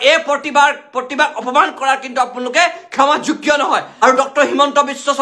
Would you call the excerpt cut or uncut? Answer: cut